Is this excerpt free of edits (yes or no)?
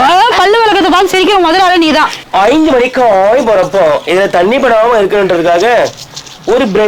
no